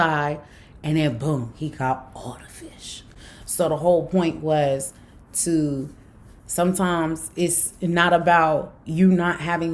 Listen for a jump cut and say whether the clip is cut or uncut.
uncut